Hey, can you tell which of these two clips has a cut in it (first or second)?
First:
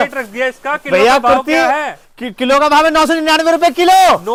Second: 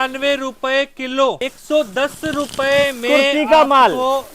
second